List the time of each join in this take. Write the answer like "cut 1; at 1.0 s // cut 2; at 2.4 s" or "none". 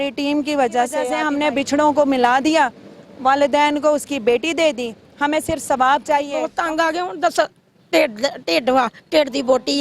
cut 1; at 1.2 s // cut 2; at 6.5 s